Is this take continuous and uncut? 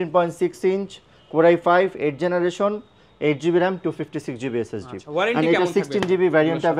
yes; 0 cuts

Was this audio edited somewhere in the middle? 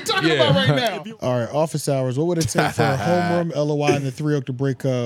yes; 1 cut; at 1.0 s

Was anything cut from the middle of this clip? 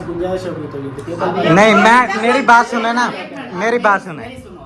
no; 0 cuts

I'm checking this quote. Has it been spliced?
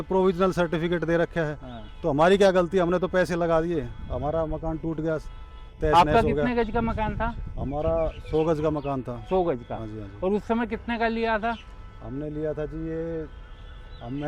no; 0 cuts

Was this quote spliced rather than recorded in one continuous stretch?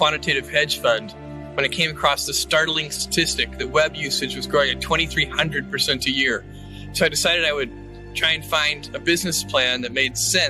no; 0 cuts

